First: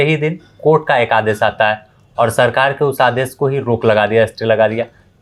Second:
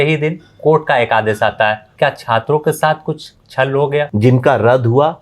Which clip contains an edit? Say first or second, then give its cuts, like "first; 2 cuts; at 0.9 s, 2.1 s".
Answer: second; 2 cuts; at 1.9 s, 4.1 s